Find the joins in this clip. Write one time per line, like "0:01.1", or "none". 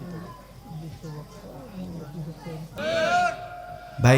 0:02.8